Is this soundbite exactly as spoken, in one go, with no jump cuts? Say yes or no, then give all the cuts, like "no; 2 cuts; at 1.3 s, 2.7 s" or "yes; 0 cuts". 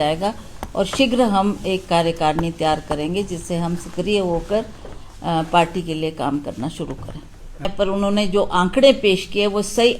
no; 1 cut; at 7.7 s